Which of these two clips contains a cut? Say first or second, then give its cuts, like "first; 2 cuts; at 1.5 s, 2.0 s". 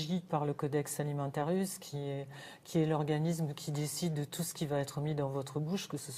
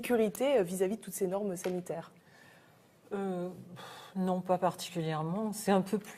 second; 1 cut; at 5.2 s